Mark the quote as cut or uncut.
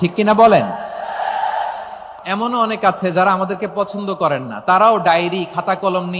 cut